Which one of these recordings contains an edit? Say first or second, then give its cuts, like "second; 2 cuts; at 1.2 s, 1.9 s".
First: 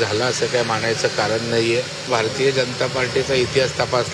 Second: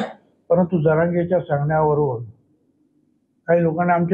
first; 1 cut; at 2.1 s